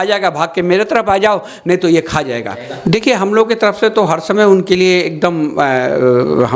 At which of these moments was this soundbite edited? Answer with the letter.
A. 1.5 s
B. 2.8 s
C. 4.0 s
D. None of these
B